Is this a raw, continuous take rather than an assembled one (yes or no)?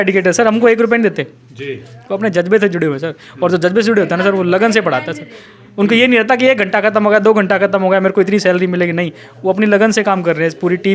yes